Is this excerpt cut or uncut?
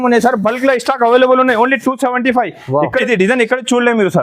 cut